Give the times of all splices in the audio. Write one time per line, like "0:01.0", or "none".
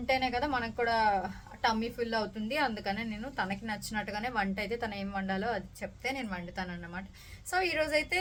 none